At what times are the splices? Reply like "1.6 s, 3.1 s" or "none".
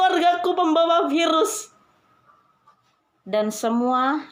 none